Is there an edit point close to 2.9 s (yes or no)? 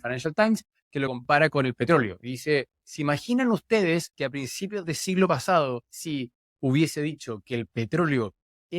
no